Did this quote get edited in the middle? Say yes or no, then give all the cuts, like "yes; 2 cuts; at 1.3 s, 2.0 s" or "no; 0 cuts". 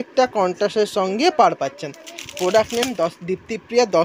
no; 0 cuts